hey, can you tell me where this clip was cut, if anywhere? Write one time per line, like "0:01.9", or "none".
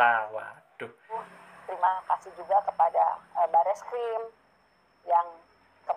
0:01.3